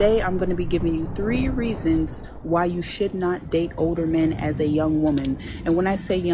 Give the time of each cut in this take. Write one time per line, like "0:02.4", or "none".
none